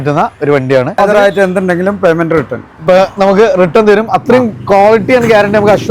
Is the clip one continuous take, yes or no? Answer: no